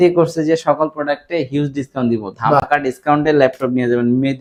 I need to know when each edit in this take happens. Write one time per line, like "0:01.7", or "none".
none